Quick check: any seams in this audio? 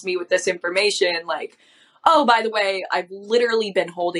no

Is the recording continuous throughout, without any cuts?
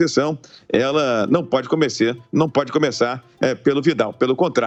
yes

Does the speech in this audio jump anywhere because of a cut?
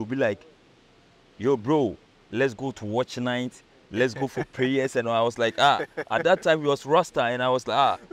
no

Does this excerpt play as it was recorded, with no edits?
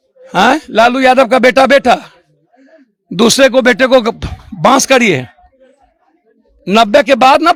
yes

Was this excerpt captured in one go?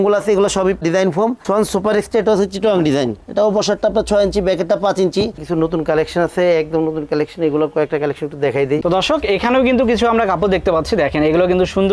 no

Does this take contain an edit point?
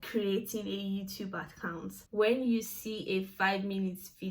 yes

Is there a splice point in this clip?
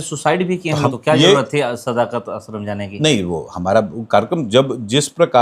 yes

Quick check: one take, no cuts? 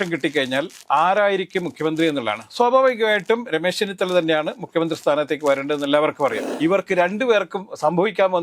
no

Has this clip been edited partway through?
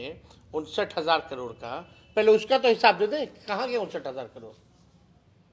no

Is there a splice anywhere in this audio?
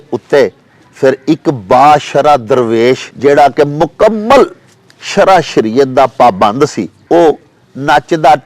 yes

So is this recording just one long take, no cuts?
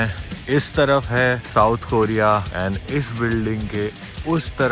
no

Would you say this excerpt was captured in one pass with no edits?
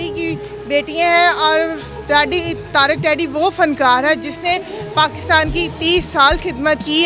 yes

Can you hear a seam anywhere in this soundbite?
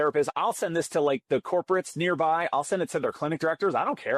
no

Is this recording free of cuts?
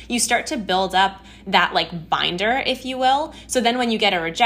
yes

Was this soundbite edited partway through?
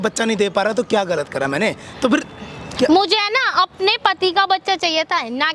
no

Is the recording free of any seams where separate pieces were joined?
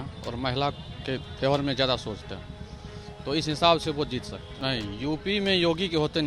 no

